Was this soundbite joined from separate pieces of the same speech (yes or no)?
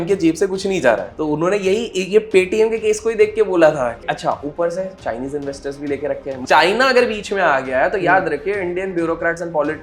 yes